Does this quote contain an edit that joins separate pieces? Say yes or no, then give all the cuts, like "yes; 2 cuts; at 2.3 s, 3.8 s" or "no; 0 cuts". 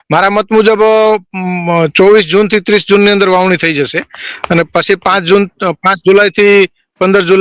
no; 0 cuts